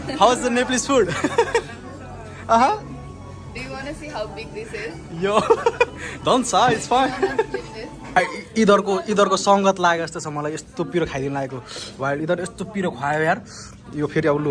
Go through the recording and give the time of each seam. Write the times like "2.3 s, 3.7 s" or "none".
7.9 s